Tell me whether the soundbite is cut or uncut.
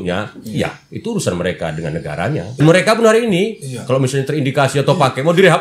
cut